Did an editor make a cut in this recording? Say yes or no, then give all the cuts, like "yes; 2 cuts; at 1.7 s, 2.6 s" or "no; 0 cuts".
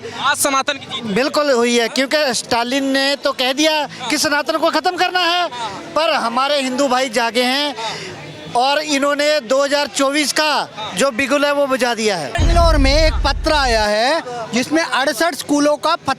yes; 1 cut; at 12.4 s